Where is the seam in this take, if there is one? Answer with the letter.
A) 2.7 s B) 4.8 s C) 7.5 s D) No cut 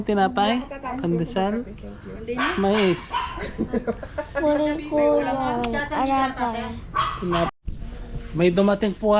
C